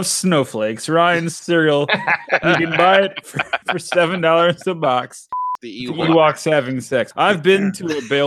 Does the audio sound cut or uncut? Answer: cut